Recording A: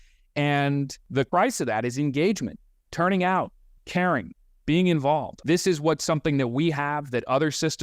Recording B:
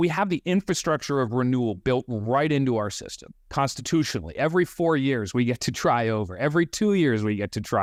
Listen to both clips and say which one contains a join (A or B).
A